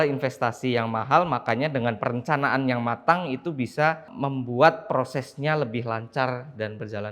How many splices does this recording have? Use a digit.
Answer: 1